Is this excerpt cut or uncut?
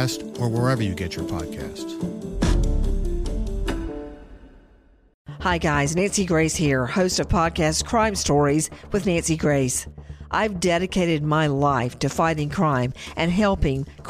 uncut